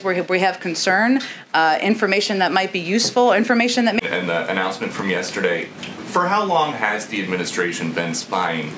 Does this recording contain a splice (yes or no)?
yes